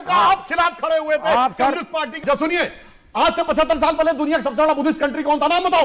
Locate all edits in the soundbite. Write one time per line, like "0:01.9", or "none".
0:02.2